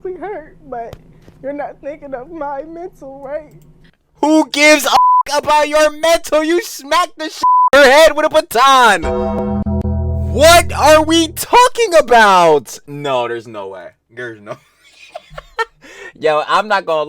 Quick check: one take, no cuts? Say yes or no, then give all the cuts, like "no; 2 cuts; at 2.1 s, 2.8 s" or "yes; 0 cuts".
no; 1 cut; at 5.0 s